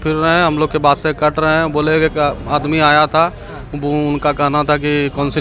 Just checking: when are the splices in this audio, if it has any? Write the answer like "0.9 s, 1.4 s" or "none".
none